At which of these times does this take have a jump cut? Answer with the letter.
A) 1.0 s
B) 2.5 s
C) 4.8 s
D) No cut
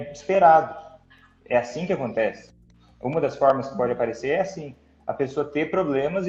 D